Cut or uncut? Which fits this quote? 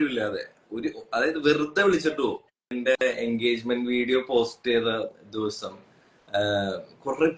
cut